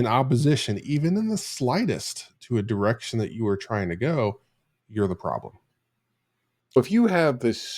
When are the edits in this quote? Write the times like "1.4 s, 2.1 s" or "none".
6.8 s